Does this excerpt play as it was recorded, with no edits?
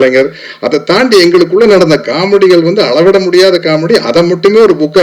yes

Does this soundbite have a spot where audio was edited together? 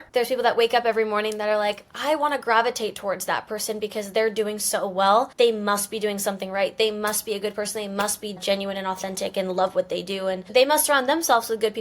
yes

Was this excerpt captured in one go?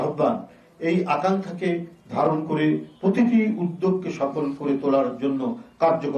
yes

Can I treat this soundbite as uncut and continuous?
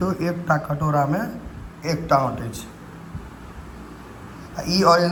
yes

